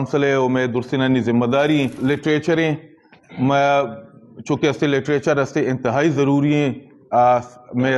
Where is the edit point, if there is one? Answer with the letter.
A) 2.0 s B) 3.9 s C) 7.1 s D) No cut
A